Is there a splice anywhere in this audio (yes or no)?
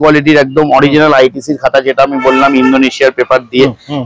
no